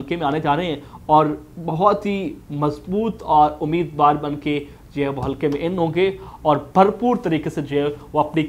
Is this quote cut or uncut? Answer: uncut